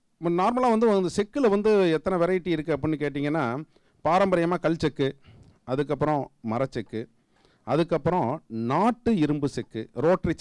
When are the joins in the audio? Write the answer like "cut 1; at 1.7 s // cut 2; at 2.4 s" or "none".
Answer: none